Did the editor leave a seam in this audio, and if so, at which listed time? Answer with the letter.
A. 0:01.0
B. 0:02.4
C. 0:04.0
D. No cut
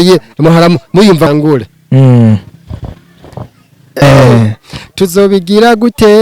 C